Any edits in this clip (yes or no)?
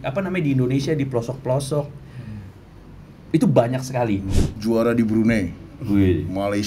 yes